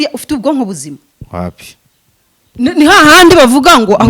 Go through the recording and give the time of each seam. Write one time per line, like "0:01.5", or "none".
none